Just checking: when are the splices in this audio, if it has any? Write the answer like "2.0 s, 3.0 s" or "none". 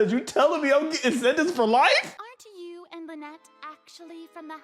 2.1 s